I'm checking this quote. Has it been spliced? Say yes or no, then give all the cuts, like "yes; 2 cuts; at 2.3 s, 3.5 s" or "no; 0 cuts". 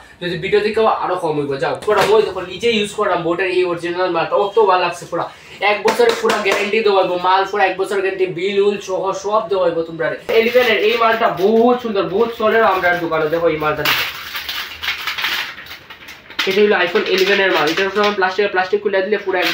yes; 2 cuts; at 1.8 s, 10.3 s